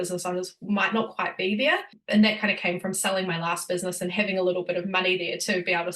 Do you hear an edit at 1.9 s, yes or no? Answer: yes